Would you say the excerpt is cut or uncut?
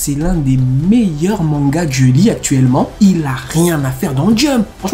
cut